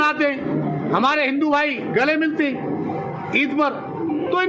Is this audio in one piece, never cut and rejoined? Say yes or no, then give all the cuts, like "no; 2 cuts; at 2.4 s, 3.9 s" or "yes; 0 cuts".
yes; 0 cuts